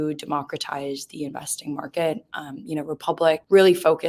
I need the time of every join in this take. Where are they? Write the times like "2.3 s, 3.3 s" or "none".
none